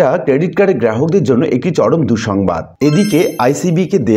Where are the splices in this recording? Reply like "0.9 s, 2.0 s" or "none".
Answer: 2.7 s